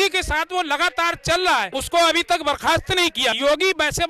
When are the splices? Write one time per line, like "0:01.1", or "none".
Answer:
0:01.8
0:03.4

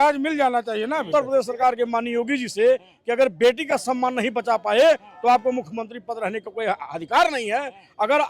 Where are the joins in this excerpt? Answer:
0:01.1

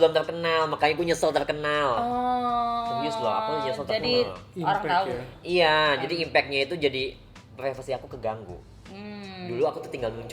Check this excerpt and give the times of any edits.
none

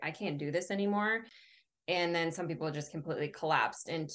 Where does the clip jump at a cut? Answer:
none

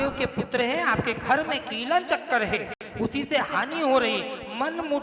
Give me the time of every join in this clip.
none

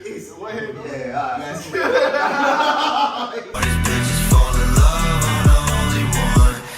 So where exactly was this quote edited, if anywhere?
0:03.6

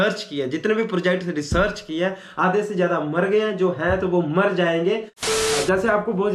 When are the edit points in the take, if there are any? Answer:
0:05.3

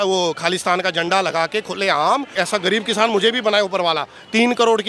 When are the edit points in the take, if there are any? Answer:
0:02.3

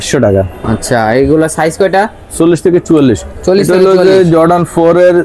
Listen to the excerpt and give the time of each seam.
none

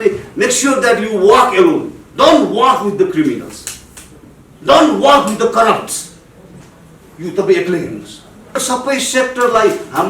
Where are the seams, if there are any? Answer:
0:08.6

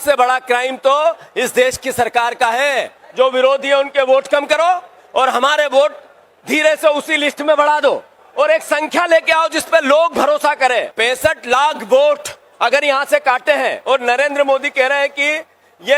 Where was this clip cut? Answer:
0:03.0
0:10.9

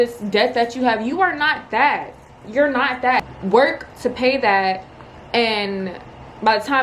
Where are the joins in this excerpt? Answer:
0:03.3

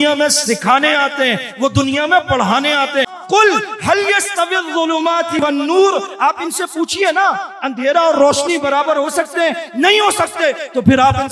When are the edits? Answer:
0:03.2

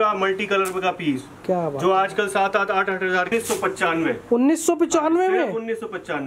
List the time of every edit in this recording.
0:03.3

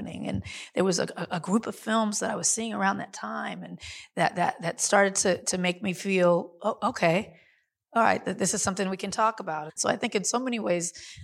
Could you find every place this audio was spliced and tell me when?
0:09.7

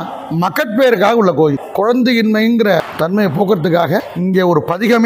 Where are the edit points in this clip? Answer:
0:01.6
0:02.9
0:04.1

